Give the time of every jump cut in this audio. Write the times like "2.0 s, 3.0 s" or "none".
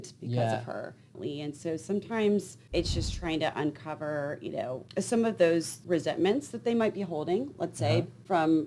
1.1 s